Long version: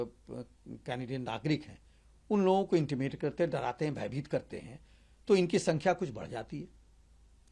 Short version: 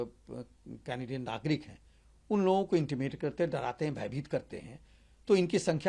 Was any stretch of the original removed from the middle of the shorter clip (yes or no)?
no